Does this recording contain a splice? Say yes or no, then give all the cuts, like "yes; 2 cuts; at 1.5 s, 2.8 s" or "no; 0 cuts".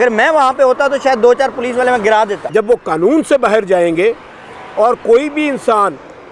yes; 1 cut; at 2.4 s